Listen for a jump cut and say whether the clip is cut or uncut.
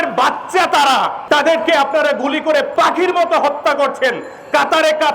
cut